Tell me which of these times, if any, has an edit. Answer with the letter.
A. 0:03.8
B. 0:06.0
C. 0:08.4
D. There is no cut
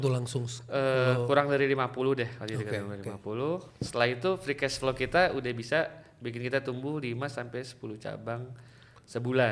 A